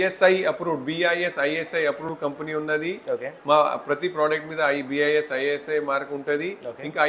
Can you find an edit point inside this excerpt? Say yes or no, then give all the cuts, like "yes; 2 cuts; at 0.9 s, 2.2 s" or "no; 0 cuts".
no; 0 cuts